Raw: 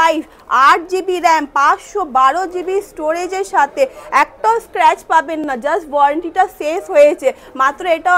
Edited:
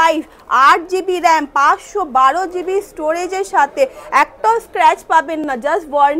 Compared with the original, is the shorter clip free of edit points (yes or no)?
yes